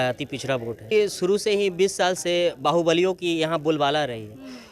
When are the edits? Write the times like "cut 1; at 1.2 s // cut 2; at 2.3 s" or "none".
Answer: cut 1; at 0.9 s